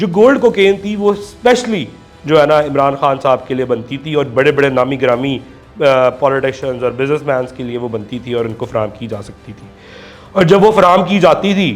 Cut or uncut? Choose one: uncut